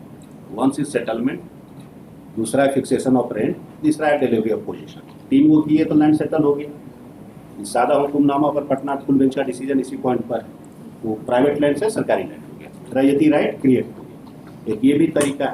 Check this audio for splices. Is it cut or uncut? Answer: uncut